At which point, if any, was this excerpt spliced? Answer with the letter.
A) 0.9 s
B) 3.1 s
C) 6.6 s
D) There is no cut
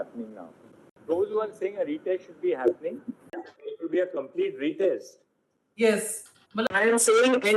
C